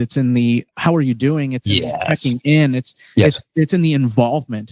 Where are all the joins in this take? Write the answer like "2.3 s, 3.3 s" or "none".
none